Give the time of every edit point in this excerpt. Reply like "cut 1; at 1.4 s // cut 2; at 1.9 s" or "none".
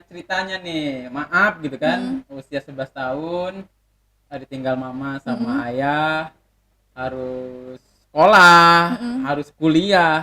none